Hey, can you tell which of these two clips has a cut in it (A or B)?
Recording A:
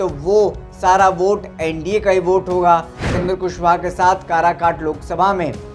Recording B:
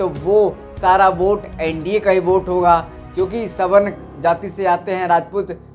A